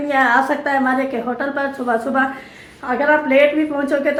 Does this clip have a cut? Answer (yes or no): no